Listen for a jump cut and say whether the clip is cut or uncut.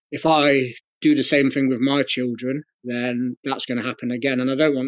uncut